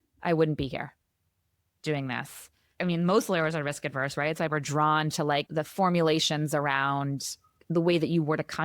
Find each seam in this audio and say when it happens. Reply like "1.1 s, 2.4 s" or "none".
2.7 s, 7.5 s